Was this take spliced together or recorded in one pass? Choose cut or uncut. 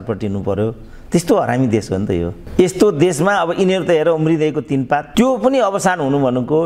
cut